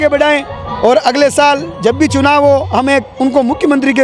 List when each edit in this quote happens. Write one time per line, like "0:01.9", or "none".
none